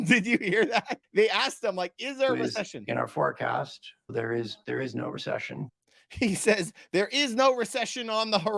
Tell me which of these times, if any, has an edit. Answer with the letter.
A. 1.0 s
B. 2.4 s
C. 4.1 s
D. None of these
C